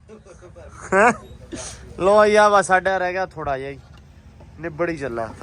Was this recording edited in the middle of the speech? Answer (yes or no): no